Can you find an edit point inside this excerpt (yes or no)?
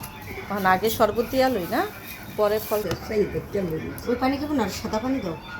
yes